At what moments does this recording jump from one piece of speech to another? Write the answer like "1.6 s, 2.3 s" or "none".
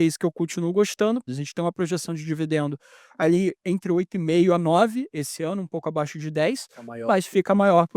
1.3 s